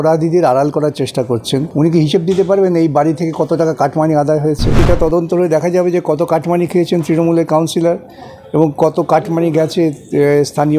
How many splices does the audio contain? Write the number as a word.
two